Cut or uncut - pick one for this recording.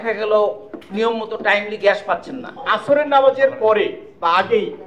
cut